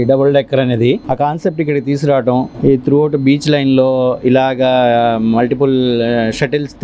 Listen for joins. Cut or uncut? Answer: uncut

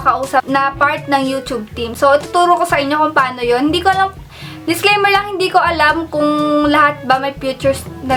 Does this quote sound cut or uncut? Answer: uncut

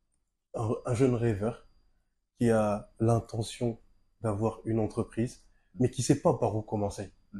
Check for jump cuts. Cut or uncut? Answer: uncut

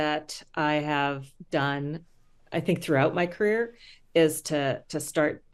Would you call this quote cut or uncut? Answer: uncut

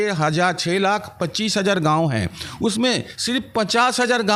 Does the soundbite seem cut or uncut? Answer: uncut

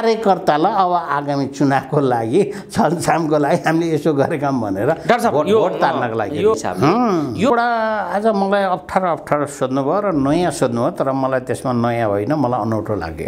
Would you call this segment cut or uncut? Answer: cut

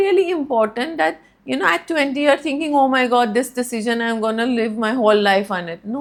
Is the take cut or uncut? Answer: uncut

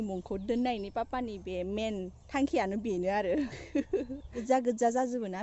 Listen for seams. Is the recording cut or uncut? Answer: cut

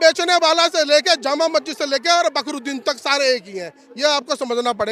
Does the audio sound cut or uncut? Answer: uncut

